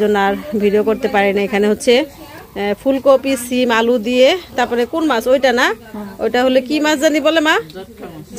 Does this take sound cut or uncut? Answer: uncut